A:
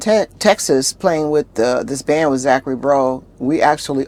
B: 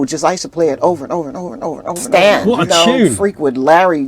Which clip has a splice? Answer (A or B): B